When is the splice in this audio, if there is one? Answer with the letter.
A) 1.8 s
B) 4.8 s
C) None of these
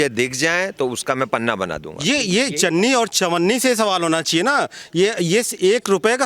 A